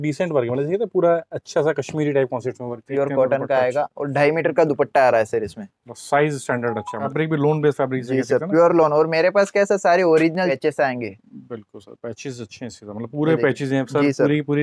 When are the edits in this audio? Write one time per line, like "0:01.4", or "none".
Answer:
0:02.8
0:07.0
0:10.5